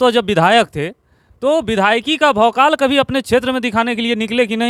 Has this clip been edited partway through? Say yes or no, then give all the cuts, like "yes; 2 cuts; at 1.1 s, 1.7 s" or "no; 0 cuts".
no; 0 cuts